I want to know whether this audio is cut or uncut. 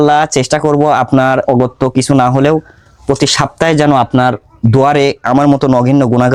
uncut